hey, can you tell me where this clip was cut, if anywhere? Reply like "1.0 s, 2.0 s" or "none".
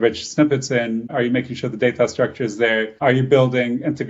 1.1 s, 3.0 s